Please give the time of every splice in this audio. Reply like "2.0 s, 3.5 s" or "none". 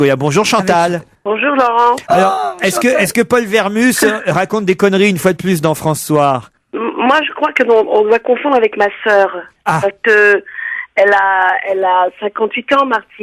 2.6 s